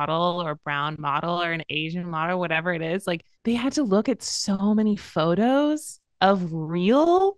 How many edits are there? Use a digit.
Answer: 1